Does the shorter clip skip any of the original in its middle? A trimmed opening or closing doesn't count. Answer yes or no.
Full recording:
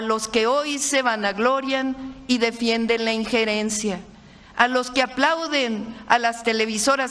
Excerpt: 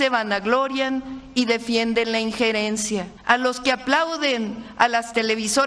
yes